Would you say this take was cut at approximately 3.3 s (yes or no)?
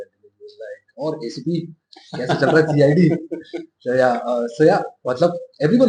no